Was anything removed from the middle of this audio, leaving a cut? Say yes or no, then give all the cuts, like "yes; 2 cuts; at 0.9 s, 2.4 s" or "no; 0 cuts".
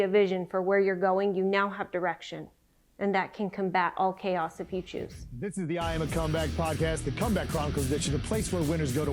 yes; 1 cut; at 5.2 s